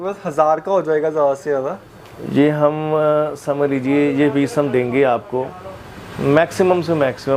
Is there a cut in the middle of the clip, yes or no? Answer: no